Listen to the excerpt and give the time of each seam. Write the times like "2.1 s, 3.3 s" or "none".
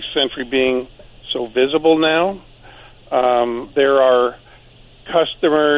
none